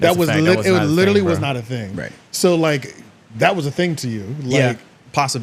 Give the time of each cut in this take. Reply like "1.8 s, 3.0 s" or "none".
none